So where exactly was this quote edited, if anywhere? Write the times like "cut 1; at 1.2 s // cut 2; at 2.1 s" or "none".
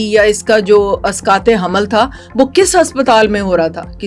none